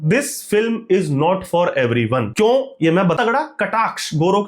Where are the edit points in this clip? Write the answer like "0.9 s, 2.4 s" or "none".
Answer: 2.3 s, 3.2 s